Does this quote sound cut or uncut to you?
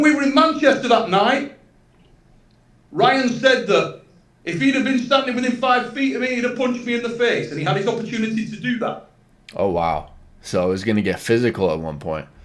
uncut